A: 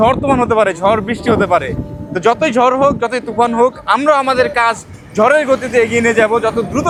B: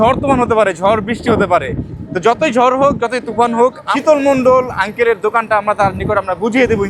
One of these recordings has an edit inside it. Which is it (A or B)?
B